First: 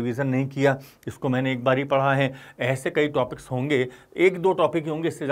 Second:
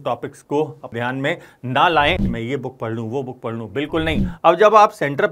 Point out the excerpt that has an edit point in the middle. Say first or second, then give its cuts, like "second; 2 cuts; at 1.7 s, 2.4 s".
second; 3 cuts; at 0.9 s, 2.3 s, 4.3 s